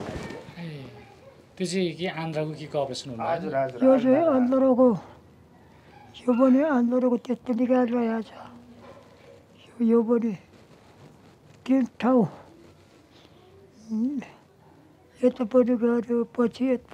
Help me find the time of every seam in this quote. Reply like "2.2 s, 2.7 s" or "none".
none